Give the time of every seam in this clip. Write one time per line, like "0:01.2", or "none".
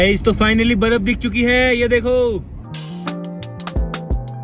none